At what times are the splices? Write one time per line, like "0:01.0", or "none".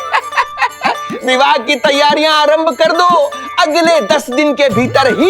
0:01.1